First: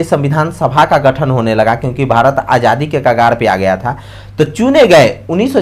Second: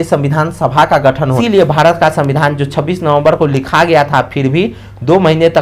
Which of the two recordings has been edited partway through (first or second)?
second